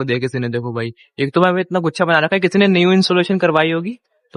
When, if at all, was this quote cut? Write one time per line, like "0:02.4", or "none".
none